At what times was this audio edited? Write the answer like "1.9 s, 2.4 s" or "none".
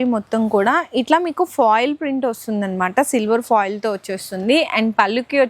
none